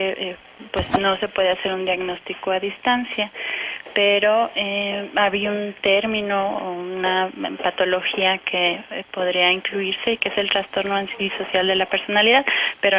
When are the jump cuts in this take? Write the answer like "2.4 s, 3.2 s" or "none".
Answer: 5.8 s